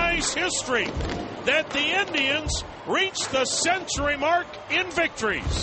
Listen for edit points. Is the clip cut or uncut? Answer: uncut